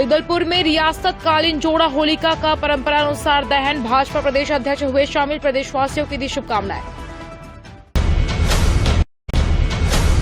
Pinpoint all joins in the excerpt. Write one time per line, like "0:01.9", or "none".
0:07.7
0:09.4

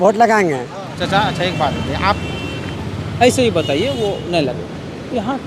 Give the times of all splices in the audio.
0:00.9

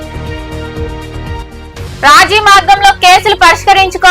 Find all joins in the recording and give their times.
0:01.4

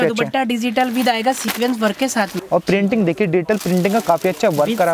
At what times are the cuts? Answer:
0:02.4

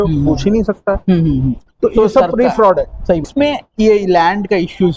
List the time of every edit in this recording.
0:03.3

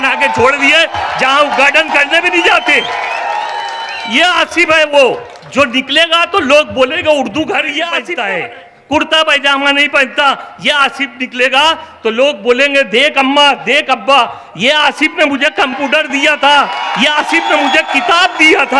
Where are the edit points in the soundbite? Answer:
0:08.0

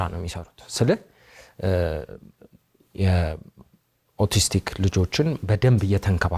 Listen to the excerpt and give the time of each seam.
none

